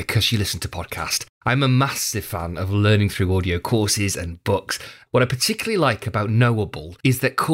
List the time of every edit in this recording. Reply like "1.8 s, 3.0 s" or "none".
none